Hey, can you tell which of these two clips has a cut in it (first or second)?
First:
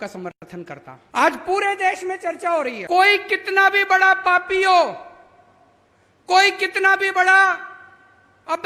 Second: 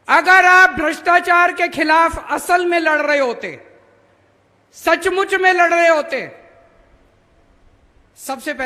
first